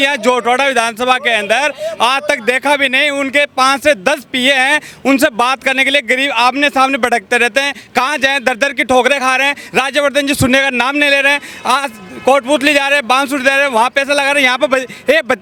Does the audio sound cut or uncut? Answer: uncut